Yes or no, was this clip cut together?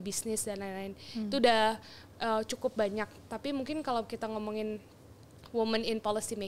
no